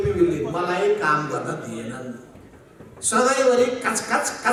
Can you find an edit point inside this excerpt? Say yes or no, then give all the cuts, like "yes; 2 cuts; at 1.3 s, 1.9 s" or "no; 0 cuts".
no; 0 cuts